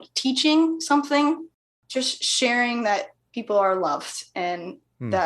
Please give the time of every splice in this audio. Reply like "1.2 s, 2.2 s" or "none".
1.5 s